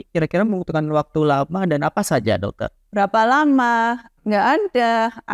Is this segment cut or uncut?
cut